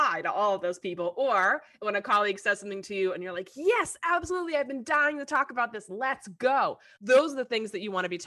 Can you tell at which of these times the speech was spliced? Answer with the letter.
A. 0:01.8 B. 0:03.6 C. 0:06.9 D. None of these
C